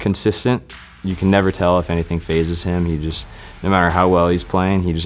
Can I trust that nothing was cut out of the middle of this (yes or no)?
yes